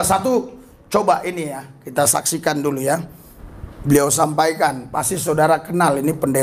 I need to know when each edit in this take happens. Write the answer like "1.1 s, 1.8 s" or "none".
3.1 s